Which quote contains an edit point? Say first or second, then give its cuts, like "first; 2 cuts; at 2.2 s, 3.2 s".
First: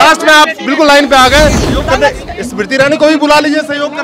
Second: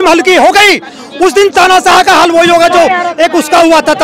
first; 1 cut; at 1.6 s